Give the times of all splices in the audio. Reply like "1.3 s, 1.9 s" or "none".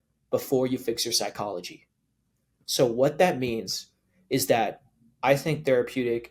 none

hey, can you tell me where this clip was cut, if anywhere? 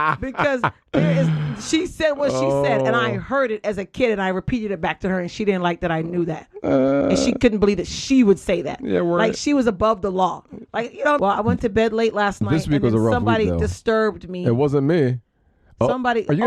11.2 s

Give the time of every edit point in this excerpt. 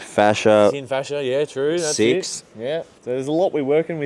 2.9 s

